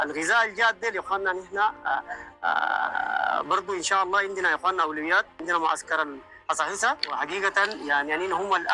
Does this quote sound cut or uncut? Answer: uncut